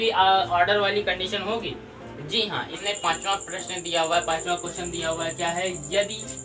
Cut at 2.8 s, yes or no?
yes